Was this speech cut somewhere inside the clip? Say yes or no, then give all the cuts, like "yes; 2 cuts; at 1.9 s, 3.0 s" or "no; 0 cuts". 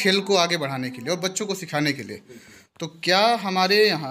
no; 0 cuts